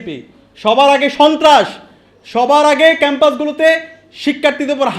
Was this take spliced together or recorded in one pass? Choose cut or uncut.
uncut